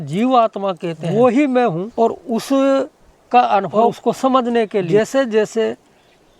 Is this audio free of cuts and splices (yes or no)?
no